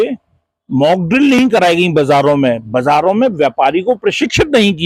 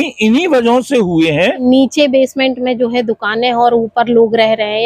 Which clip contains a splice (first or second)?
second